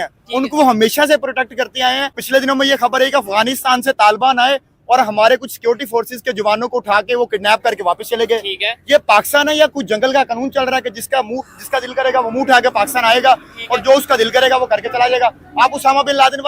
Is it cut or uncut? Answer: cut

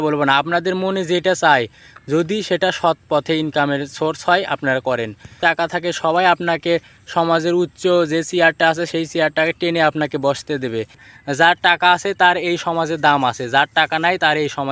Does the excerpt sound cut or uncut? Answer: cut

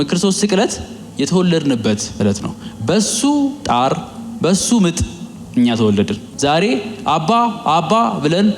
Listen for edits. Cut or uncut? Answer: cut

